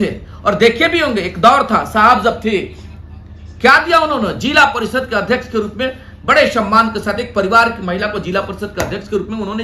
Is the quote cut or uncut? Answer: uncut